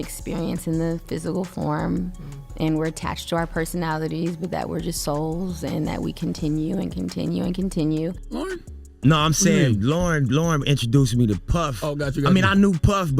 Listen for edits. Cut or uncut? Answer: cut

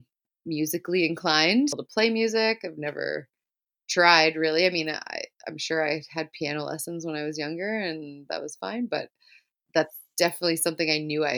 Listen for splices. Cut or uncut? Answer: cut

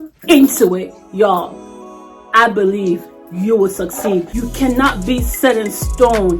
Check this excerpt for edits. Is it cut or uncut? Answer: cut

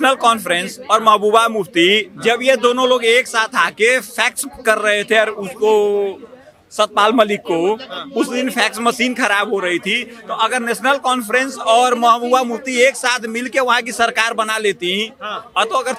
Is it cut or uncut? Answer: uncut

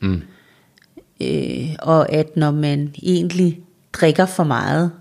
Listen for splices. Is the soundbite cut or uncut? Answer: uncut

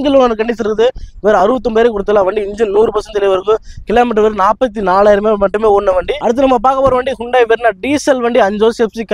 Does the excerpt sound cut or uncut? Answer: uncut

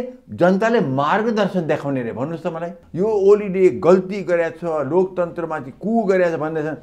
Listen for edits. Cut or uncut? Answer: cut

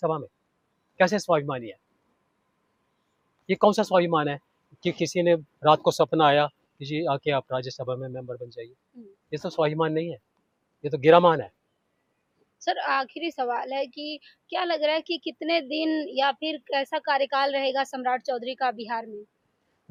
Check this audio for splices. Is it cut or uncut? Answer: uncut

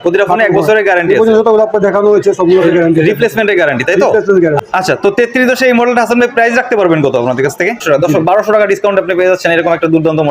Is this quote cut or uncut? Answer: cut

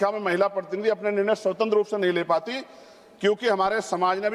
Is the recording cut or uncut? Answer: uncut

